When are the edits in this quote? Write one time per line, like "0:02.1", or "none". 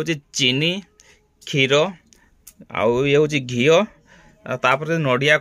none